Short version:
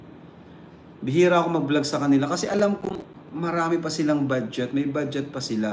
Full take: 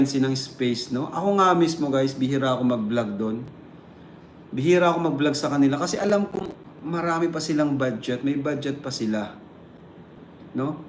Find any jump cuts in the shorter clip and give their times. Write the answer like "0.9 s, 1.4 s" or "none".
none